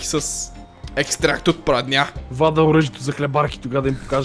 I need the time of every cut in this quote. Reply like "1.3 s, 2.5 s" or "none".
2.2 s